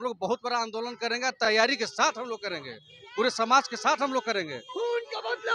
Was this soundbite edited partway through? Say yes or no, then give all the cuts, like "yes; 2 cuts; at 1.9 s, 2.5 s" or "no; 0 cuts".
no; 0 cuts